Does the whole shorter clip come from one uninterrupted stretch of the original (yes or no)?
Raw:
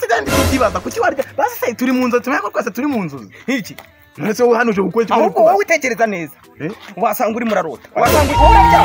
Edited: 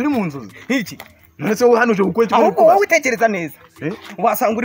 yes